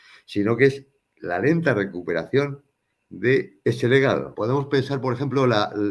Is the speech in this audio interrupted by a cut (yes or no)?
yes